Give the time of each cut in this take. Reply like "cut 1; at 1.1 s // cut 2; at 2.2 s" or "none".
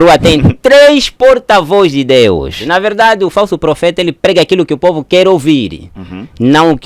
cut 1; at 2.6 s